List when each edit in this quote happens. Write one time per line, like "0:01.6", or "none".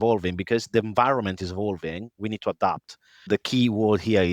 0:03.3